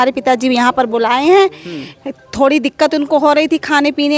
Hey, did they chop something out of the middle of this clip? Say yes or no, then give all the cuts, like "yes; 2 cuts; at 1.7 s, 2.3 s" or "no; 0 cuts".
no; 0 cuts